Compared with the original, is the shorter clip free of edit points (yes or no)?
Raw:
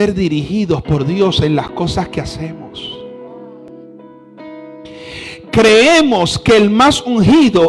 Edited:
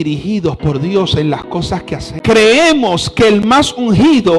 no